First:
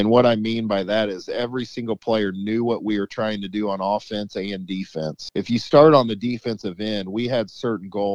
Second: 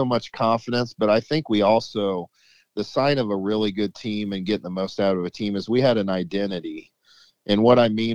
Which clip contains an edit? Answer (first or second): first